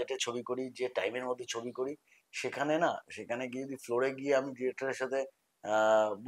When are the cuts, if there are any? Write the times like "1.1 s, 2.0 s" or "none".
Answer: none

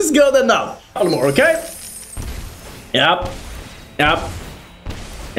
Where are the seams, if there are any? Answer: 1.0 s

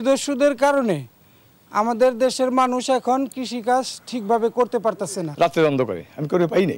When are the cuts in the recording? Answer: 5.3 s

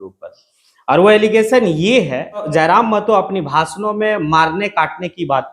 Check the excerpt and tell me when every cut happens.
2.5 s

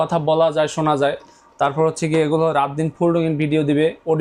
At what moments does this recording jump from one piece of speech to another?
none

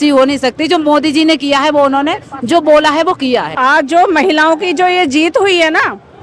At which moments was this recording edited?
3.5 s

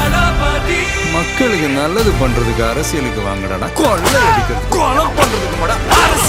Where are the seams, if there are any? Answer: none

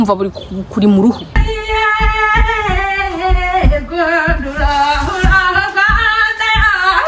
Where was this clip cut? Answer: 1.4 s

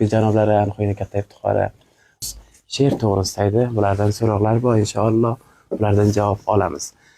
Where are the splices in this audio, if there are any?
2.2 s

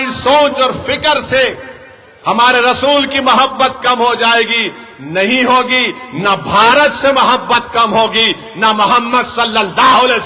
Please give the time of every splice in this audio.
none

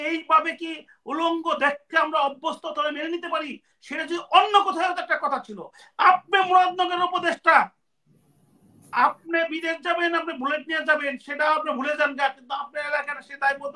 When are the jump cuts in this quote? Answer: none

